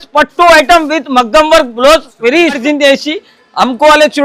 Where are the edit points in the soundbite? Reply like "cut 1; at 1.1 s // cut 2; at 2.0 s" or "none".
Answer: cut 1; at 2.6 s